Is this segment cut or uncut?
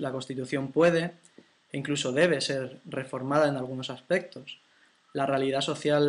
cut